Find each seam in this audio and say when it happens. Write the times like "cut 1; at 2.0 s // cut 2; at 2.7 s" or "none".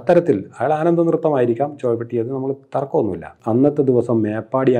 cut 1; at 3.3 s